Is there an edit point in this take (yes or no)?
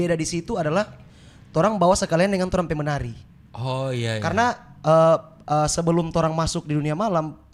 no